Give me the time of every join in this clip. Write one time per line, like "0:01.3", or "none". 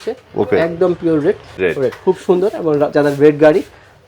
0:01.6